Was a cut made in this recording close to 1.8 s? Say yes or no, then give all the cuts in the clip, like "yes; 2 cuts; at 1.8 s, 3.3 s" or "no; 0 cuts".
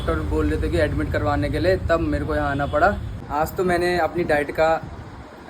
no; 1 cut; at 3.1 s